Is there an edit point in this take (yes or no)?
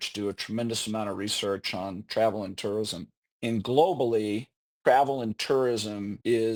no